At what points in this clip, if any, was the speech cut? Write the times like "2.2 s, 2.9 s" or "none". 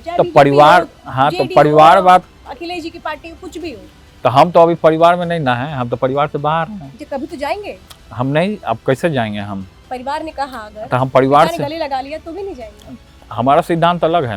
none